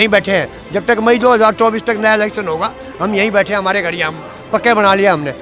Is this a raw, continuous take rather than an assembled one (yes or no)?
yes